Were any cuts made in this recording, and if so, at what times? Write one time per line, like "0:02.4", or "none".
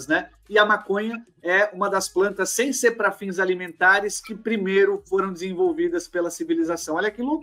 none